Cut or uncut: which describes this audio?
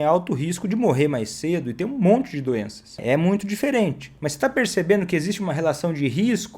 cut